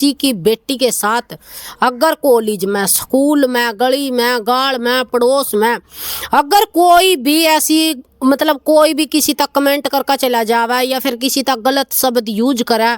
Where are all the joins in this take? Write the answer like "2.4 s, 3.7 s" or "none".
none